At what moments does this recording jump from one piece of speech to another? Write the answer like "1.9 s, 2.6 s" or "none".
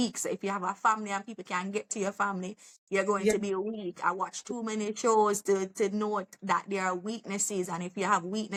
none